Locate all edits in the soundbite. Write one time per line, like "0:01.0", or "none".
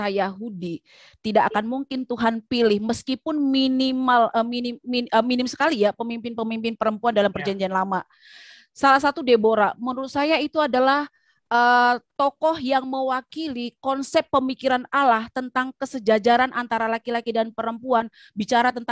none